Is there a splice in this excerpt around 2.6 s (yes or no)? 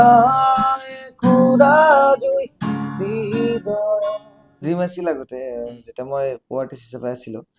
no